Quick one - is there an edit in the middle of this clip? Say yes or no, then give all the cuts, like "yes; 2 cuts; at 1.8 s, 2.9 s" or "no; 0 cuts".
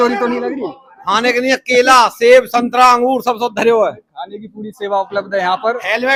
no; 0 cuts